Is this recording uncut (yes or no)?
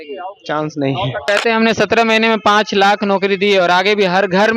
no